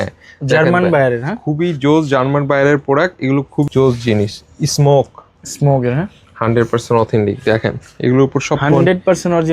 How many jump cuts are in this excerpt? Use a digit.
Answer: 1